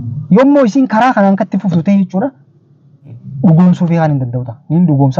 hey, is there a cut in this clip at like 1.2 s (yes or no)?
no